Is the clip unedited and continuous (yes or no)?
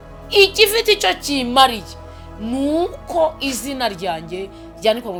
yes